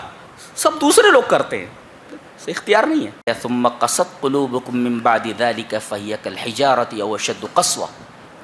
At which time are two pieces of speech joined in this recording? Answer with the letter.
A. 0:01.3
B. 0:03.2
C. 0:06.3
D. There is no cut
B